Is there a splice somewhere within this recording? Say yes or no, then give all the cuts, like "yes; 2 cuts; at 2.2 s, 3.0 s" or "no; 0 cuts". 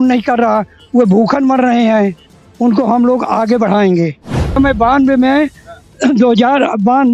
yes; 1 cut; at 4.6 s